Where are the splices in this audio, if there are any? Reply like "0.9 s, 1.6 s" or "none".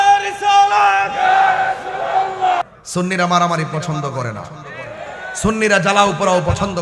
2.6 s